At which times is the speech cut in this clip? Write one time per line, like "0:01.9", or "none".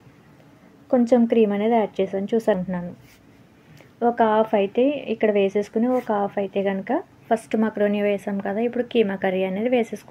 0:02.5
0:07.1